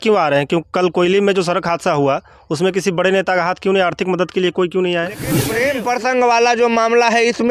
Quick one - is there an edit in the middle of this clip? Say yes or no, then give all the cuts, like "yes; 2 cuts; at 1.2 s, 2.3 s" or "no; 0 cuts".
yes; 1 cut; at 5.4 s